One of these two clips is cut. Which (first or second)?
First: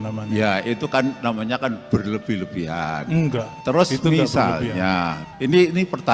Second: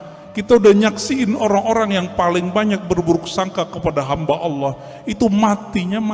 first